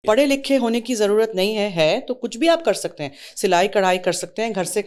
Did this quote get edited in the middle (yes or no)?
no